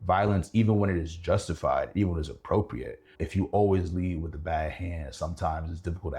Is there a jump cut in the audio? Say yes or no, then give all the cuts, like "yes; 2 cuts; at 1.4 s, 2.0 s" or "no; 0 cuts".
yes; 1 cut; at 3.2 s